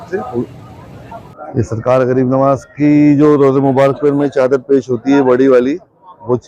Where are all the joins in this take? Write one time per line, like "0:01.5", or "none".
0:01.0